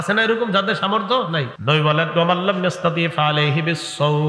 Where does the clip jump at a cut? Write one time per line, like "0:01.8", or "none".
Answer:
0:01.5